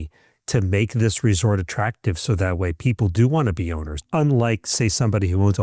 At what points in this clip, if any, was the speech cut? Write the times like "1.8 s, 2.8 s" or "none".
3.9 s